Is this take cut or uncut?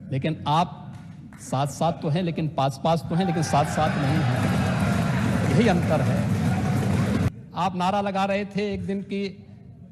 cut